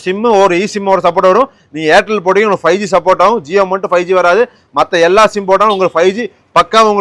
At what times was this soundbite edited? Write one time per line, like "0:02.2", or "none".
none